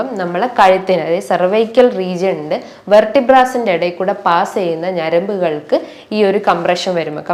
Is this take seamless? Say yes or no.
yes